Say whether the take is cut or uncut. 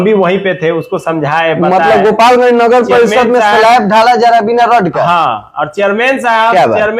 uncut